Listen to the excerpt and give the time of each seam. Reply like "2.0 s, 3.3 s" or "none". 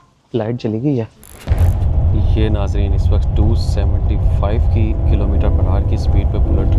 1.2 s